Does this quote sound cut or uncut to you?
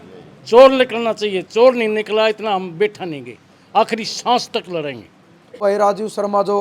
cut